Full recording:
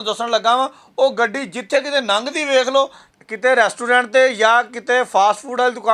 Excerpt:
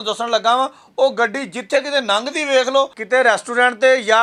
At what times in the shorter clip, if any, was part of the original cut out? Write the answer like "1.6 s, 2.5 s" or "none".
3.0 s